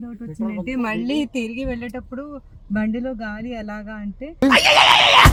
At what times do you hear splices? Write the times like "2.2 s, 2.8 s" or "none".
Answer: none